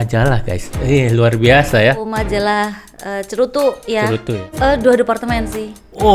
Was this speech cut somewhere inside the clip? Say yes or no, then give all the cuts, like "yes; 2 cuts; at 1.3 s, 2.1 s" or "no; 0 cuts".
yes; 2 cuts; at 2.1 s, 4.5 s